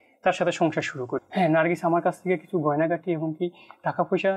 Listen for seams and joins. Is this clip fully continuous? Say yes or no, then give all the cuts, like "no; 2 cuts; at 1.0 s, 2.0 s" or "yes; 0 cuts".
no; 1 cut; at 1.1 s